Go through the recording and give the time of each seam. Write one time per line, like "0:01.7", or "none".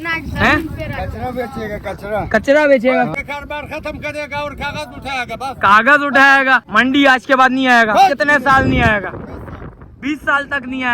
0:03.1
0:06.7